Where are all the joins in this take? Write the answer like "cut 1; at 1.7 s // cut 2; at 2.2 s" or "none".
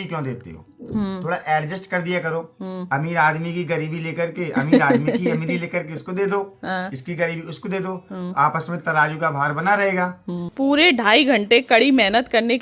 cut 1; at 10.5 s